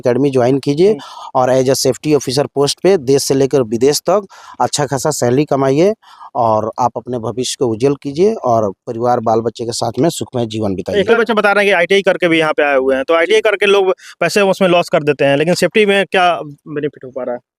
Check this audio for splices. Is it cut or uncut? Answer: uncut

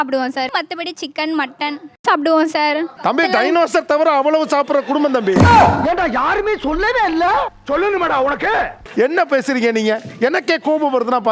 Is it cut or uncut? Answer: uncut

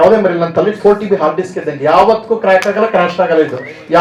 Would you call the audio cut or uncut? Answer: uncut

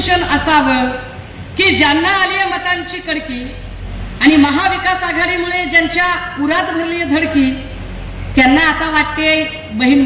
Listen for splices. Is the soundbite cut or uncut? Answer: uncut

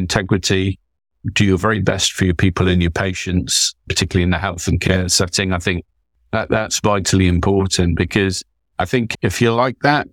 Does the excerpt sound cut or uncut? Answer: uncut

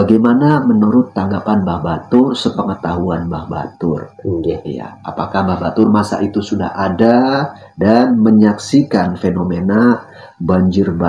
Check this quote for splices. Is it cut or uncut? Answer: uncut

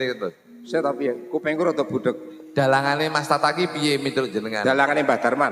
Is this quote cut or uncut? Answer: uncut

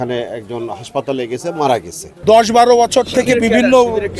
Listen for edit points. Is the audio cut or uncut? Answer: cut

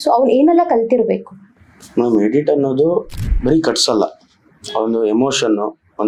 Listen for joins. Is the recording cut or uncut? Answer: uncut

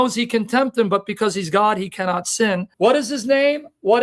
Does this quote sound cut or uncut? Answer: cut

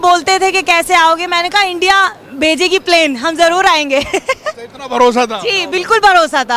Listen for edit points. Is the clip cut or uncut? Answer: uncut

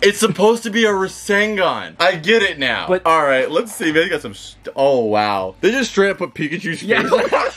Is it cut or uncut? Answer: uncut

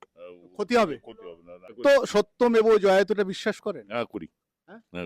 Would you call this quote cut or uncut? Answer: cut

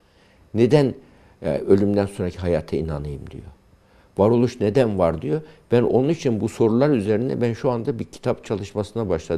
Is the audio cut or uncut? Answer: uncut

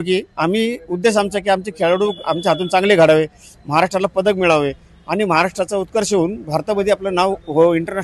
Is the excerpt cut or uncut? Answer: uncut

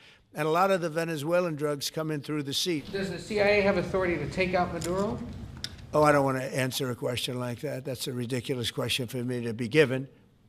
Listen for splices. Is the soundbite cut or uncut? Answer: cut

